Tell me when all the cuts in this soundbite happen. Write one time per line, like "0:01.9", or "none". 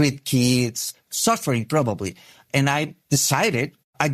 0:01.0
0:03.0